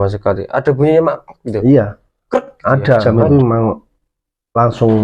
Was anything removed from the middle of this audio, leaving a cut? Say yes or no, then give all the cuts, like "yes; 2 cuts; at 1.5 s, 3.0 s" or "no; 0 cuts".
yes; 1 cut; at 3.0 s